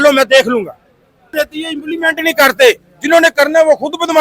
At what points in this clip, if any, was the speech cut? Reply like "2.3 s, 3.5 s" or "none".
1.3 s